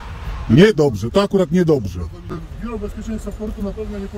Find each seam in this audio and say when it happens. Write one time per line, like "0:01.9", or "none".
0:02.5